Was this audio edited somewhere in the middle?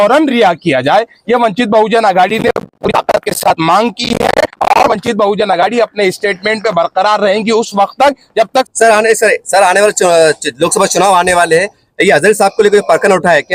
no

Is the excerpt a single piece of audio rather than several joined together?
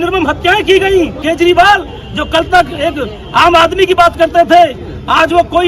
no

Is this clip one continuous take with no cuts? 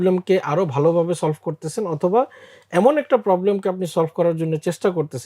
yes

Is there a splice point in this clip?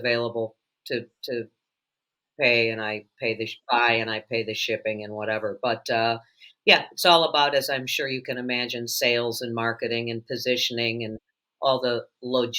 no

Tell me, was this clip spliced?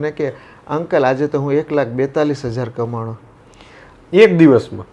no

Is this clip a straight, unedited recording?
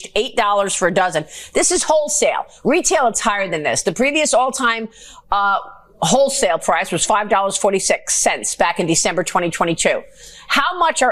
yes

